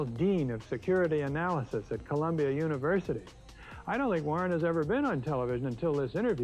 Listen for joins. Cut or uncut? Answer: cut